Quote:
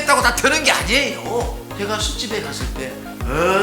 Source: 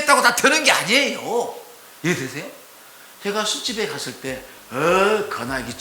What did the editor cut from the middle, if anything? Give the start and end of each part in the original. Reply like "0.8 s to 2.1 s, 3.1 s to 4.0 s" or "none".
1.6 s to 3.1 s

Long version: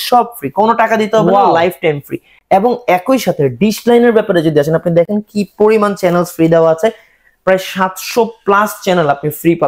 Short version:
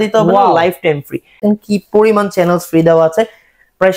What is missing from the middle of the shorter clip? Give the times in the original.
2.4 s to 5.1 s

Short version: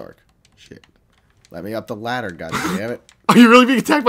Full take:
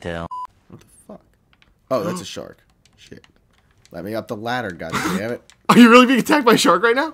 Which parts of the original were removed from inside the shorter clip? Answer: none

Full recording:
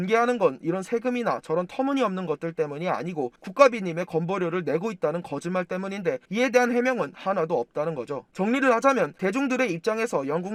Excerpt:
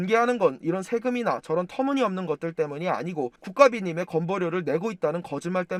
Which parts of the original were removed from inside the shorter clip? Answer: none

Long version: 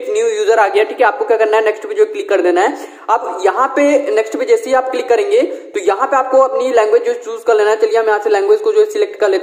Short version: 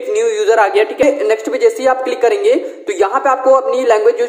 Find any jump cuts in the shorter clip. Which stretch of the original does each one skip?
1.0 s to 3.9 s

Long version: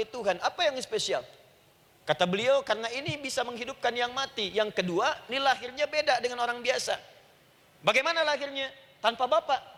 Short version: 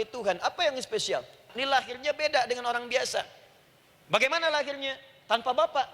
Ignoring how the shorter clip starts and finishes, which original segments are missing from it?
1.5 s to 5.3 s

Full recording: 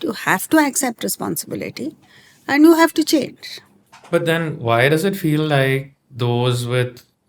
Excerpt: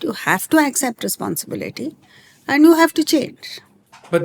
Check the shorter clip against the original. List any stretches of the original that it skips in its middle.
none

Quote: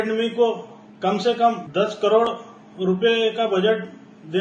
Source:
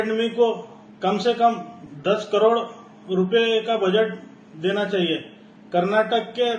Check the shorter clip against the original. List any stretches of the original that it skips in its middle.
1.6 s to 1.9 s

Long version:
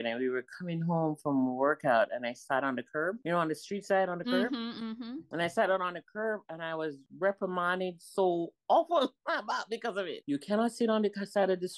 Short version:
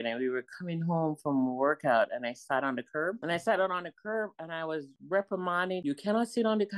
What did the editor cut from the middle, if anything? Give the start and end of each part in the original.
3.2 s to 5.3 s, 7.9 s to 10.2 s

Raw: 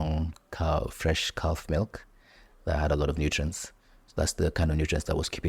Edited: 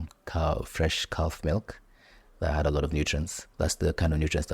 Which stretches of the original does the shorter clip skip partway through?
3.6 s to 4.0 s

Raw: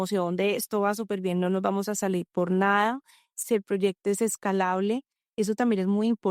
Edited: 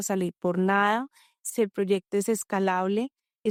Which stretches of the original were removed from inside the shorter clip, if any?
none

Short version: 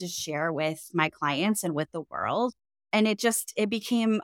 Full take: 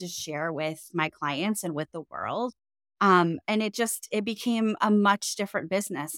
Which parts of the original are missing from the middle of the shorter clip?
2.8 s to 3.4 s

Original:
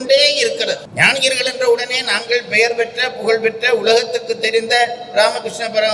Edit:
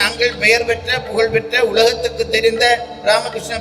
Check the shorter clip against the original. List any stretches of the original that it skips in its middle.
none

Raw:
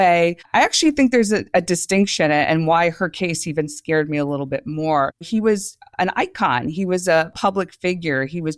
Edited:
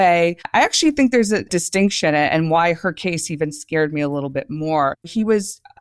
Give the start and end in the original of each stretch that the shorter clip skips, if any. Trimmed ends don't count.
1.5 s to 1.6 s

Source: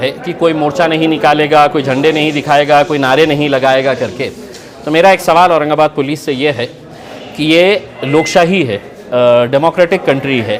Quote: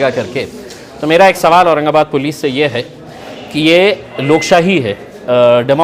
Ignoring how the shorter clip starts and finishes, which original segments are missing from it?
none

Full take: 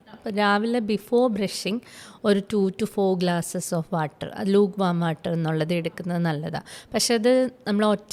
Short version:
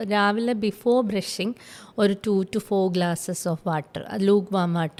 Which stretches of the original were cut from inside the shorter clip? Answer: none

